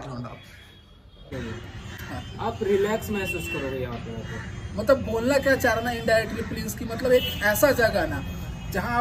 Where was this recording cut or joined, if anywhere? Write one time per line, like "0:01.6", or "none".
0:01.3